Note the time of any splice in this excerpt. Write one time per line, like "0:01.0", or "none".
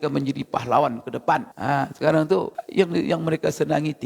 0:01.5
0:02.6

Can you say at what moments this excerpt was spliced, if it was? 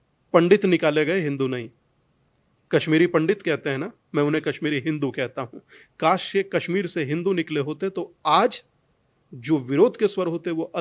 none

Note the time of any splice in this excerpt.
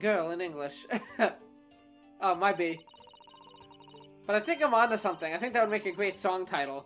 none

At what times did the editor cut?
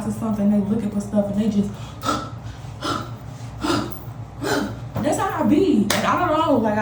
none

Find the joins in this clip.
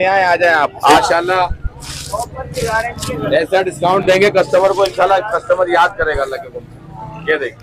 0:01.0

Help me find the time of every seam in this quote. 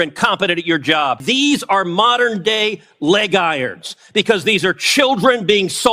0:01.2

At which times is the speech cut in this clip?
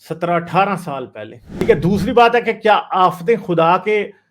0:01.6

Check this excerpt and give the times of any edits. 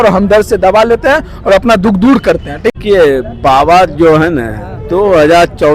0:02.7

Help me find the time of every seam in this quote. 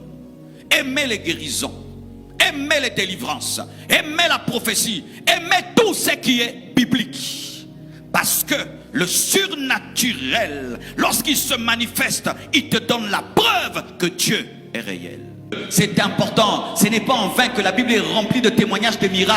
0:15.6

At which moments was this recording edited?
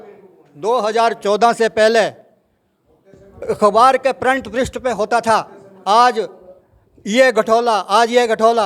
none

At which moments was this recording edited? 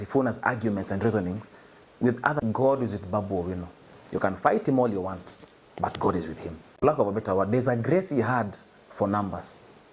0:02.4
0:06.8

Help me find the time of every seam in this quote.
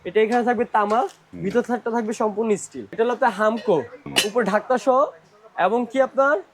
0:02.8
0:04.0

